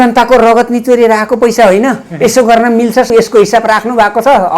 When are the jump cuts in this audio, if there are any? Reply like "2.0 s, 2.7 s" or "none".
3.1 s